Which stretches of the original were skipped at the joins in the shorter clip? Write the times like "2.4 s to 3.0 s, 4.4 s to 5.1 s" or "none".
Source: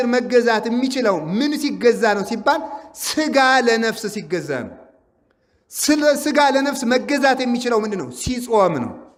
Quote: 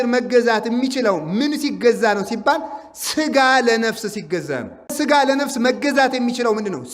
4.9 s to 6.2 s